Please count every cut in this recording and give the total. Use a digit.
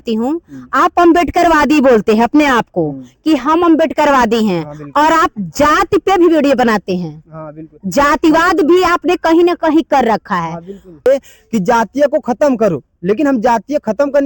1